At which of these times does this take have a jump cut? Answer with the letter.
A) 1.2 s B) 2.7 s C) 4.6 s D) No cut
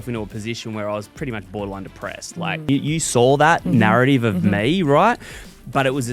B